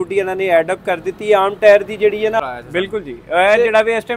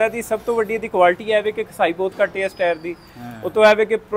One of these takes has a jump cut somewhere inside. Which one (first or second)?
first